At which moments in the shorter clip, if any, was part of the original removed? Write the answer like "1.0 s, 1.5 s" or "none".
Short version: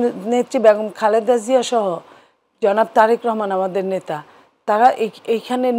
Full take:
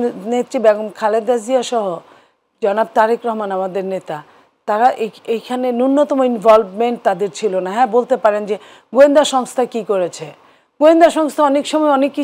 none